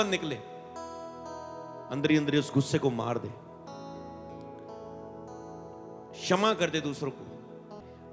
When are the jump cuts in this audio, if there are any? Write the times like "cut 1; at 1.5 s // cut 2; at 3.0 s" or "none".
none